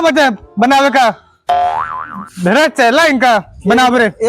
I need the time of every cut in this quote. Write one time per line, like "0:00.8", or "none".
0:01.3
0:02.2